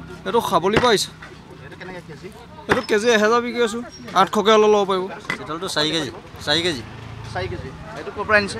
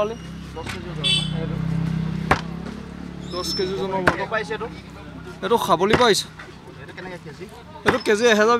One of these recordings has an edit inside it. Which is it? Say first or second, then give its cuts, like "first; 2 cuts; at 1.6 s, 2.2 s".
first; 1 cut; at 5.3 s